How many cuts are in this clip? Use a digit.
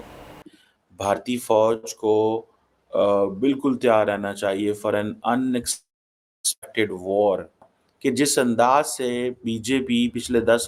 0